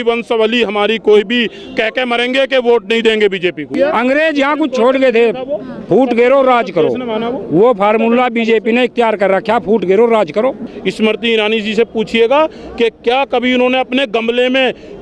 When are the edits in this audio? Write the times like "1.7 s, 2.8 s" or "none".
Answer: 3.7 s, 10.7 s